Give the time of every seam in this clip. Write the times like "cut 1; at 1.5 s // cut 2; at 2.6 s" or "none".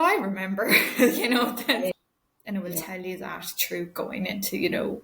cut 1; at 2.0 s

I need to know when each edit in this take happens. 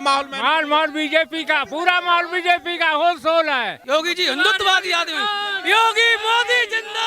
cut 1; at 3.8 s

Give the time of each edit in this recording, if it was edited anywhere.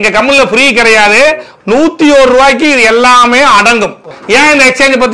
cut 1; at 4.1 s

